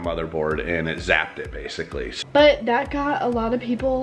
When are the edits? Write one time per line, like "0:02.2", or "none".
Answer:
0:02.1